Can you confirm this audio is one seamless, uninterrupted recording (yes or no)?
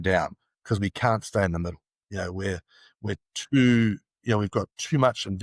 yes